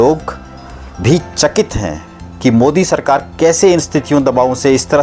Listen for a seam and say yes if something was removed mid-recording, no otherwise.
no